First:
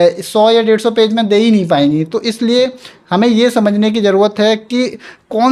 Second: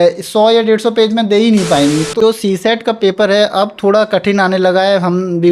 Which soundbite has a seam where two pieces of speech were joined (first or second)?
second